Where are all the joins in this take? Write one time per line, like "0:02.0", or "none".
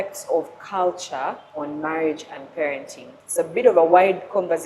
0:01.4
0:03.2